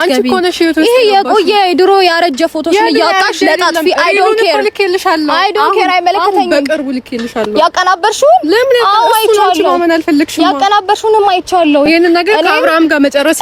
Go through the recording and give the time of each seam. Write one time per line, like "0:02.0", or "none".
none